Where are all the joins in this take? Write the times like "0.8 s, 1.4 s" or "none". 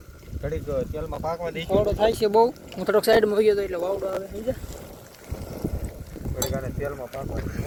none